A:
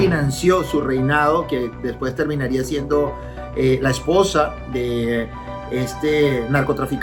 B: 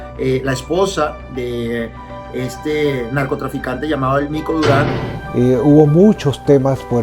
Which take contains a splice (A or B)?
B